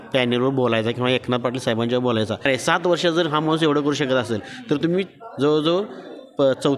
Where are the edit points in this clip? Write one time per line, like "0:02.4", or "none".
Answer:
0:02.4